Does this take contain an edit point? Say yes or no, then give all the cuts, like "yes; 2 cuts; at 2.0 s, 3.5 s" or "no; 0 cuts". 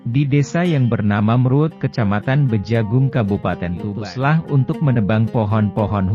yes; 1 cut; at 3.9 s